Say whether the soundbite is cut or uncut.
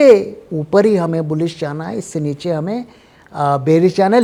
uncut